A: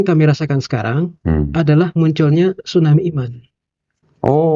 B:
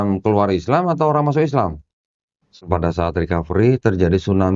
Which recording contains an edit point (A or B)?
B